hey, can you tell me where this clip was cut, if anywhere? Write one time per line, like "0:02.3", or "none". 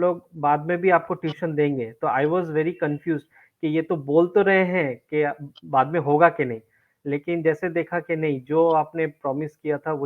none